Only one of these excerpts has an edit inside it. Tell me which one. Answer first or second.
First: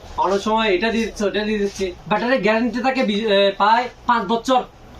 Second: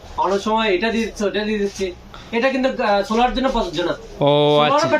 first